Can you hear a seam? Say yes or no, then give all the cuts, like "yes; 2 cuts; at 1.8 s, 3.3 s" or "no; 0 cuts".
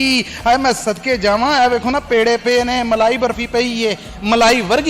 no; 0 cuts